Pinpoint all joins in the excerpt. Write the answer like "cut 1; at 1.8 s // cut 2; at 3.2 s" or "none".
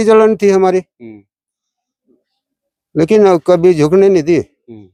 none